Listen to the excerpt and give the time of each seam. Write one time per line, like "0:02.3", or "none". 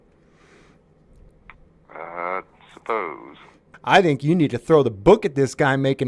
0:03.7